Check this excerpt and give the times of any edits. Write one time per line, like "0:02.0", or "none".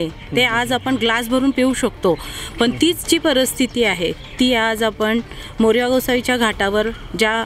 none